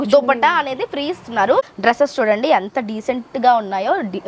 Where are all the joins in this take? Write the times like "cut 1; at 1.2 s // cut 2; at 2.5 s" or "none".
cut 1; at 1.6 s